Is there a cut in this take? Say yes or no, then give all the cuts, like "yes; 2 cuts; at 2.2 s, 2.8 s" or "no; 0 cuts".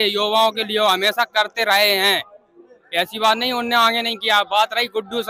no; 0 cuts